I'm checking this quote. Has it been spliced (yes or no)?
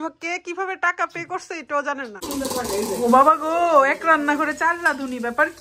yes